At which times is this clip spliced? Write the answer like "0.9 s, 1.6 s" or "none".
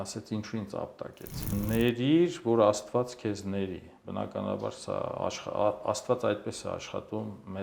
1.5 s